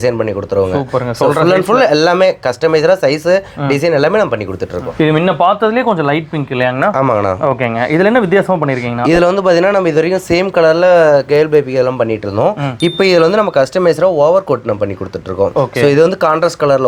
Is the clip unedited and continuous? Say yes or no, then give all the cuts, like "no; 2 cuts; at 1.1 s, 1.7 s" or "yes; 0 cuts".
yes; 0 cuts